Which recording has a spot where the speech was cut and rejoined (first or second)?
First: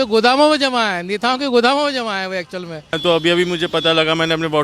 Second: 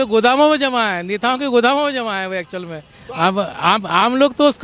first